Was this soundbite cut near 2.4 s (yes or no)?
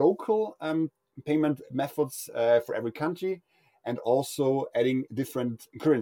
no